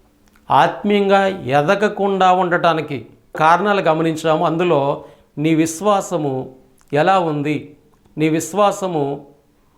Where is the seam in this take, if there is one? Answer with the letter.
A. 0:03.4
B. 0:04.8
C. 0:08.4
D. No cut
A